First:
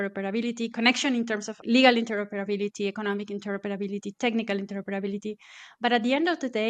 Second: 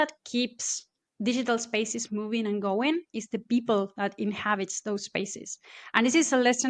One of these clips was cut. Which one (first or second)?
first